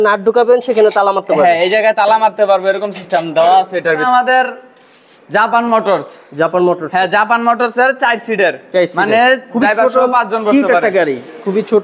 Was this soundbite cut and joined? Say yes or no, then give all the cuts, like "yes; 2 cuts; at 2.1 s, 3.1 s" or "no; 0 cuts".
yes; 1 cut; at 4.0 s